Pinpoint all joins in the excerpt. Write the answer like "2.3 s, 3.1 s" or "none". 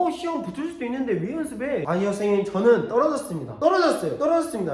none